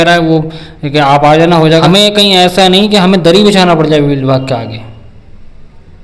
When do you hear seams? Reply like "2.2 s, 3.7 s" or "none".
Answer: 1.8 s